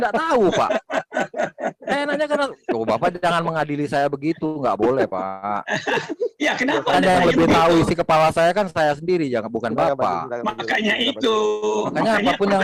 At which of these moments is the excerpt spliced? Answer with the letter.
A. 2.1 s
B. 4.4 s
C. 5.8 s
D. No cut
D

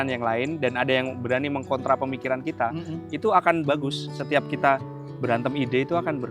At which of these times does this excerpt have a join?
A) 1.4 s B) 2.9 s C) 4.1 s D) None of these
C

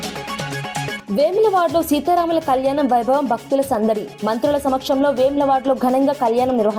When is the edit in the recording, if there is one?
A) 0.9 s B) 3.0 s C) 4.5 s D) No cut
A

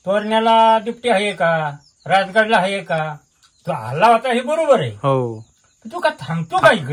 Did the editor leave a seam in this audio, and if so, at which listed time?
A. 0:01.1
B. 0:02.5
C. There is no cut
C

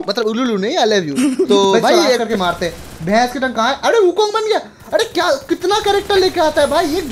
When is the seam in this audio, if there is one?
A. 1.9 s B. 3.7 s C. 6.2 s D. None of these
A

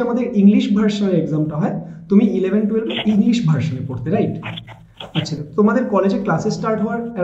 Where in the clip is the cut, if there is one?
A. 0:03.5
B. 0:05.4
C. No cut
B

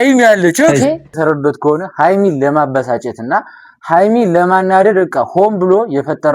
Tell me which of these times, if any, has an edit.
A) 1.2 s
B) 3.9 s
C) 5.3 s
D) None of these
A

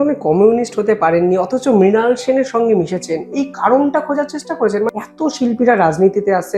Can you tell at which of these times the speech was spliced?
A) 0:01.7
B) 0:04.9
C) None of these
B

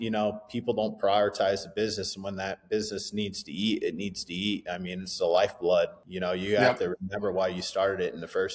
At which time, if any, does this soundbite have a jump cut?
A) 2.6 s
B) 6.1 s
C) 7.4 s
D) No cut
B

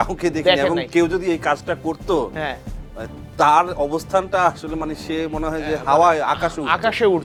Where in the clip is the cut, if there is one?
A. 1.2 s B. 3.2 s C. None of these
C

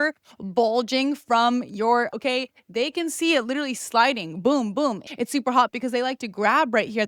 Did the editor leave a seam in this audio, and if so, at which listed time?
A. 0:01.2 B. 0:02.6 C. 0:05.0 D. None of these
C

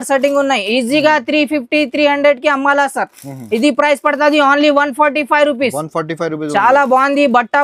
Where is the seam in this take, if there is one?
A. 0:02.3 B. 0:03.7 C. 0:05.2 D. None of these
D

